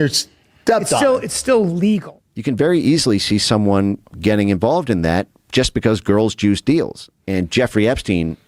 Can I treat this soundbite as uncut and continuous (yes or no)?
no